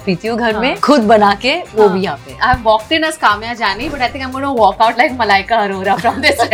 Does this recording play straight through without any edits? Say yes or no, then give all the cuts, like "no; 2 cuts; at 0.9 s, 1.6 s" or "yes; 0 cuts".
yes; 0 cuts